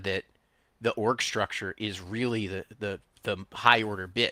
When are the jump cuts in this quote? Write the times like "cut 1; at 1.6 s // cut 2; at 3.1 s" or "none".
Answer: cut 1; at 3.1 s